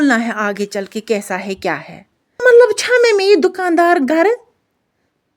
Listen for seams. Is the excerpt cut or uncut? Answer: cut